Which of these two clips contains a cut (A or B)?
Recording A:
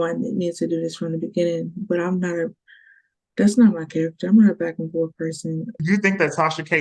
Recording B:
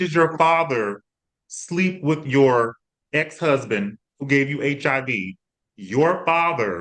A